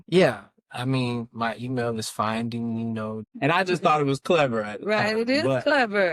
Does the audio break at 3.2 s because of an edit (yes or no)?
yes